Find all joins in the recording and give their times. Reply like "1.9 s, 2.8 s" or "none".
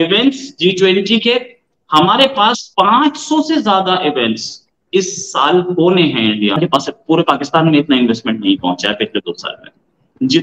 6.6 s